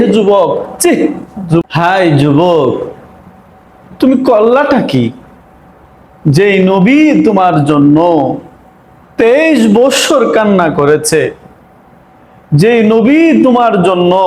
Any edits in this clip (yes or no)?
yes